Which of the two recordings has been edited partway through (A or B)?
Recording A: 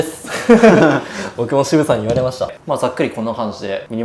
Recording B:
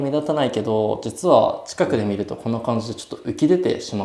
A